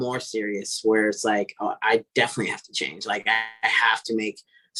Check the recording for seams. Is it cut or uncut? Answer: uncut